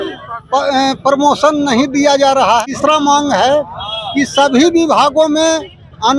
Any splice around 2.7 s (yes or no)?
yes